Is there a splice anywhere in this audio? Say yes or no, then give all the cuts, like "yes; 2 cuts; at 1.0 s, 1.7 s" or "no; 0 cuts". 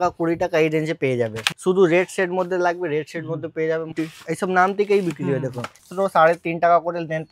yes; 3 cuts; at 1.4 s, 3.9 s, 5.9 s